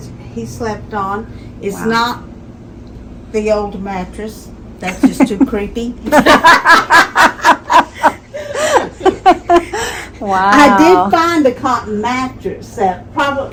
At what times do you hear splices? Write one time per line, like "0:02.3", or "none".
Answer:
none